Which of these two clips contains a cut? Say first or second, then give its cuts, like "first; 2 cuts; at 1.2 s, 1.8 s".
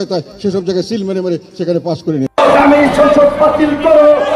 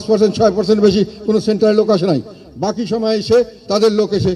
first; 1 cut; at 2.3 s